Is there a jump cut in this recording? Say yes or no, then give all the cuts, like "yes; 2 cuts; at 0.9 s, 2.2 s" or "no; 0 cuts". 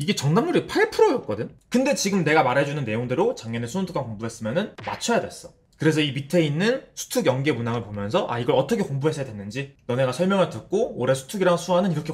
no; 0 cuts